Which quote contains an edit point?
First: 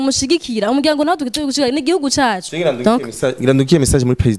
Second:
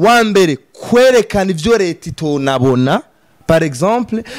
first; 1 cut; at 2.5 s

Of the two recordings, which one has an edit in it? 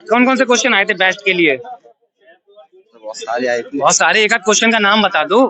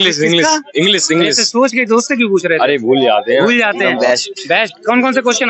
second; 1 cut; at 3.8 s

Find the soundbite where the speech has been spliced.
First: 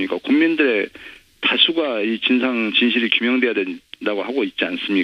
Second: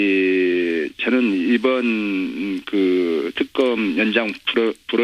second; 1 cut; at 1.7 s

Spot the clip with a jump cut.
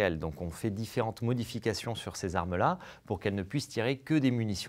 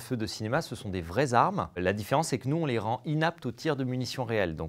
second; 1 cut; at 1.8 s

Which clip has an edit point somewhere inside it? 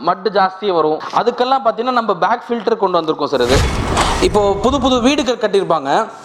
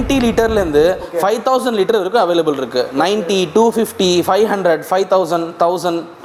first; 2 cuts; at 1.0 s, 3.8 s

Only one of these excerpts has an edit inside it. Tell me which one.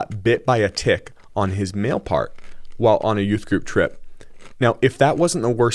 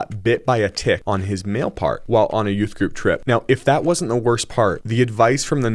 second; 4 cuts; at 1.0 s, 2.0 s, 3.2 s, 4.8 s

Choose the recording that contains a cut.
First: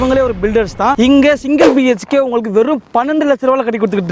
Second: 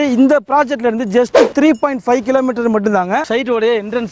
second; 1 cut; at 3.2 s

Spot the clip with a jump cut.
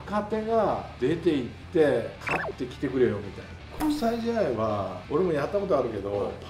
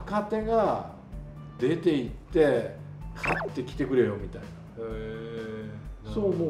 first; 4 cuts; at 0.9 s, 2.2 s, 3.8 s, 5.0 s

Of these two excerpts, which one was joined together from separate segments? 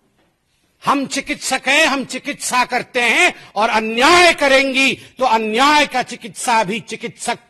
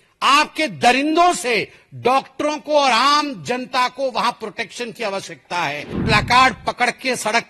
second; 1 cut; at 6.0 s

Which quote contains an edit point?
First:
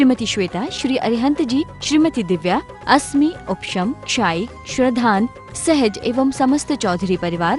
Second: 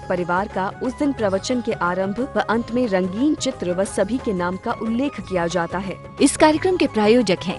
second; 1 cut; at 6.0 s

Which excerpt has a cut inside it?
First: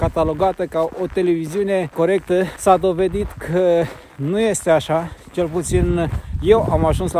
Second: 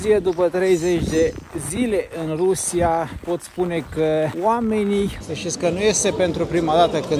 second; 2 cuts; at 4.3 s, 5.2 s

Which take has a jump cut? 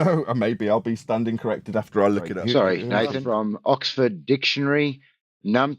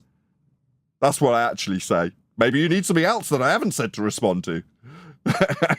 first; 2 cuts; at 2.3 s, 3.2 s

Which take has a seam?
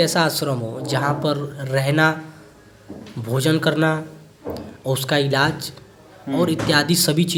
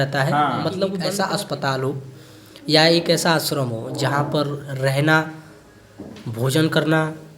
second; 1 cut; at 1.0 s

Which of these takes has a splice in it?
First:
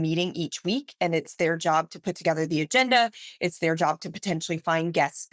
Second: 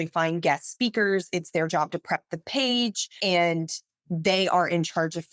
second; 1 cut; at 3.1 s

